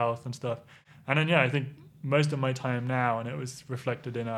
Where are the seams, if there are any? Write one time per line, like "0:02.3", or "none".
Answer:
none